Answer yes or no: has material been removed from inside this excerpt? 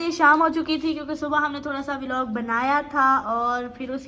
no